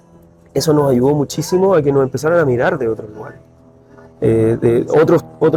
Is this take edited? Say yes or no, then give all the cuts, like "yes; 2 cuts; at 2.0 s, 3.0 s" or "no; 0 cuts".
no; 0 cuts